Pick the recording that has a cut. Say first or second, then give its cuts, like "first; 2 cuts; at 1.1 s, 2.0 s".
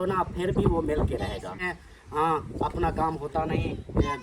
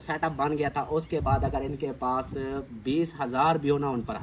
first; 1 cut; at 1.6 s